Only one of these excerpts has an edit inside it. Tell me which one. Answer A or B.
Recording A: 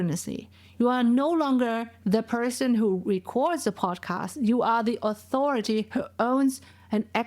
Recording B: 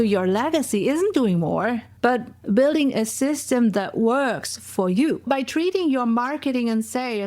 B